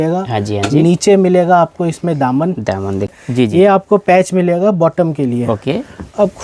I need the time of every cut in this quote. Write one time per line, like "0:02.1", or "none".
0:03.1